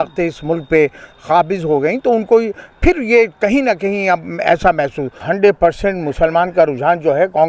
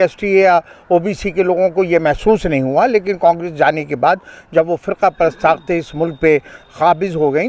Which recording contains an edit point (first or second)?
first